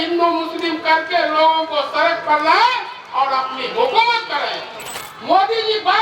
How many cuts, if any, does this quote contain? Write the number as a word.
one